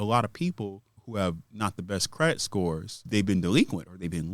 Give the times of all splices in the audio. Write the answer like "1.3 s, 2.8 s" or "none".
0.9 s, 3.0 s